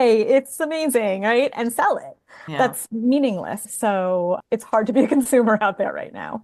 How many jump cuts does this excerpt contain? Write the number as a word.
two